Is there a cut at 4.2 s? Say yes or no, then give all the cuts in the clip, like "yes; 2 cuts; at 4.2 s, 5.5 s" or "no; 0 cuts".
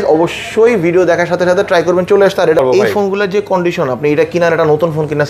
no; 1 cut; at 2.6 s